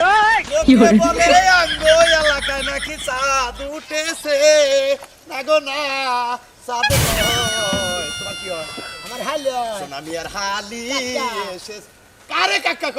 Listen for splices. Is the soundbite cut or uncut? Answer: uncut